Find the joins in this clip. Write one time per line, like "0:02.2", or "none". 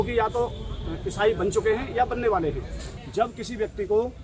0:03.0